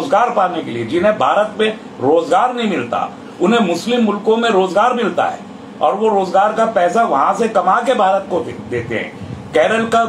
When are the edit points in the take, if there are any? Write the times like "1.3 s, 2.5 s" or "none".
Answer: none